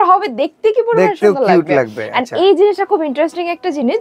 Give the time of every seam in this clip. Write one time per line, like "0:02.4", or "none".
none